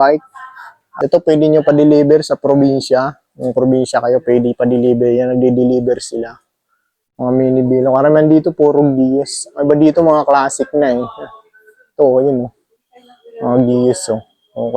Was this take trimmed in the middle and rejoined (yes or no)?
yes